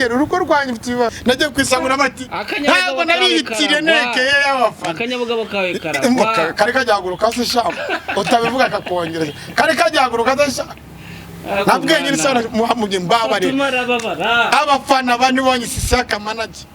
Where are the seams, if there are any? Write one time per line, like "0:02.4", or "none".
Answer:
0:01.2